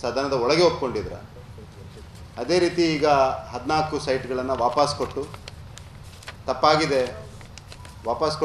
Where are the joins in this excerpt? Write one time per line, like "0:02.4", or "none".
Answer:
none

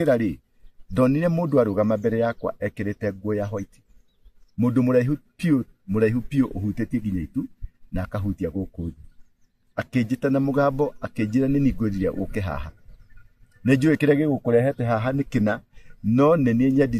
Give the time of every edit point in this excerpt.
none

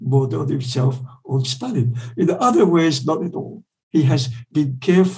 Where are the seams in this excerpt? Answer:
0:03.8

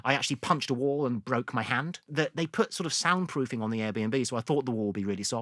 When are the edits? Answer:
0:02.1

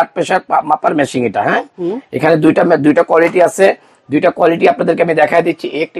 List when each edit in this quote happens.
none

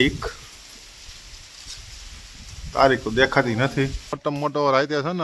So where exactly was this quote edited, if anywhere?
0:04.1

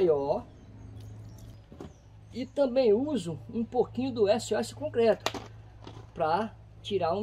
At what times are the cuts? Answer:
0:01.6

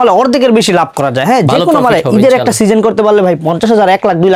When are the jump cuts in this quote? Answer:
none

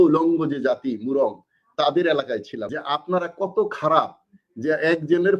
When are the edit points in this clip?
0:02.6

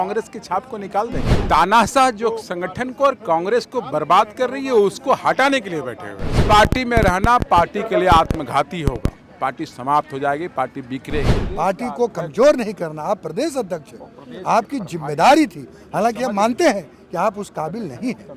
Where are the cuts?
0:01.3
0:06.4
0:11.4

